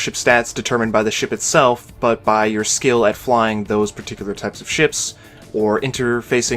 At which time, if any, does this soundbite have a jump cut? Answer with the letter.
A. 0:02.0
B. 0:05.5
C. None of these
B